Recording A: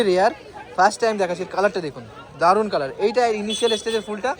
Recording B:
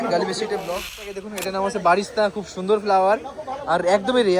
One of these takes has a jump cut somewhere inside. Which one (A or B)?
B